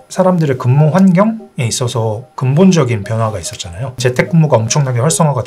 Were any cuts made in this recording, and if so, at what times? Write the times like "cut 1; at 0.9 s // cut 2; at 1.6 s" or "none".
cut 1; at 4.0 s